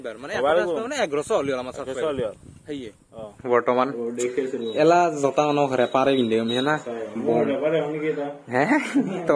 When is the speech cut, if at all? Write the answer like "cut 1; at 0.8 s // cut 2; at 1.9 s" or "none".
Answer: cut 1; at 3.4 s